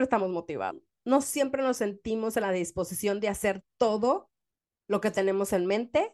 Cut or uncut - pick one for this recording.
cut